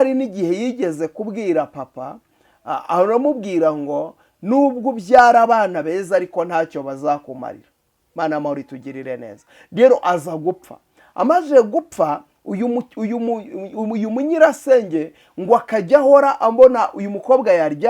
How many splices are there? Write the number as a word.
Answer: zero